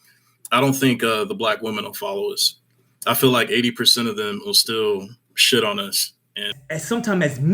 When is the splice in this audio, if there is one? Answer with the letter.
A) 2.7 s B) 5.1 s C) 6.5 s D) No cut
C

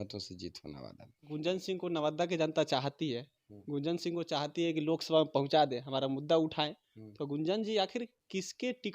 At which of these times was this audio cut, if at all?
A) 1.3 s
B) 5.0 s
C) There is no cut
A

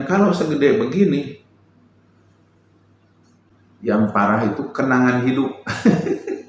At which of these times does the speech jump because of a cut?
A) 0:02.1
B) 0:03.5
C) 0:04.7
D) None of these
B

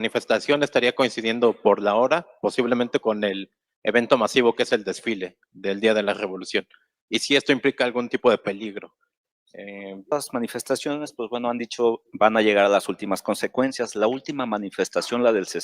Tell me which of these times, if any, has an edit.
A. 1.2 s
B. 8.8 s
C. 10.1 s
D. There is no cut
C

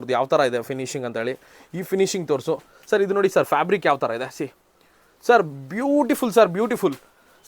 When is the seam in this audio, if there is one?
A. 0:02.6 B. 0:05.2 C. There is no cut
C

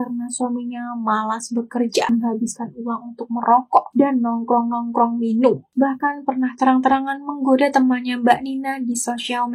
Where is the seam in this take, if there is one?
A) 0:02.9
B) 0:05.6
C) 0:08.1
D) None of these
D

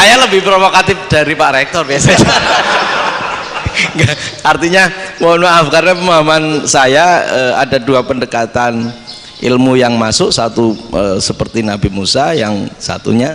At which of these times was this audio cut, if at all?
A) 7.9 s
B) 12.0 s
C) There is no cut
C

